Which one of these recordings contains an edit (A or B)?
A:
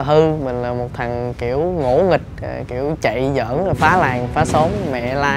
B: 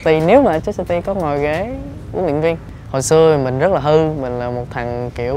B